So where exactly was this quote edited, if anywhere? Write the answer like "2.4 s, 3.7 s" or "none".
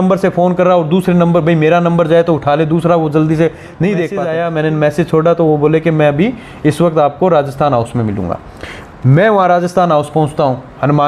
4.2 s